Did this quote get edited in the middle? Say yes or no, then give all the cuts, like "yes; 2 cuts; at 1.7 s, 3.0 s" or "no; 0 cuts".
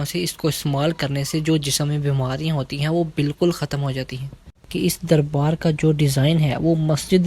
yes; 1 cut; at 4.7 s